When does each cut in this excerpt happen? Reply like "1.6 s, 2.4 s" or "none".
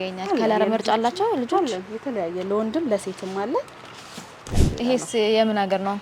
4.4 s

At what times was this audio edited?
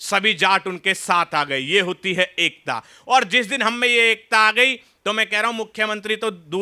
none

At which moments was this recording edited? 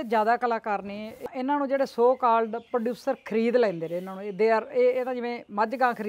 1.2 s

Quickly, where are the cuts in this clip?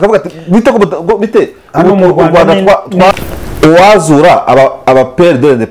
3.1 s

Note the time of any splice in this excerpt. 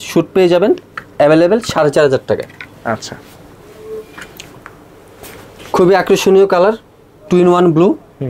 none

